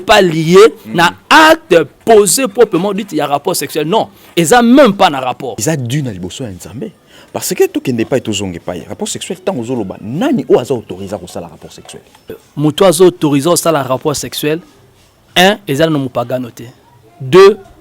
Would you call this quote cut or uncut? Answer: cut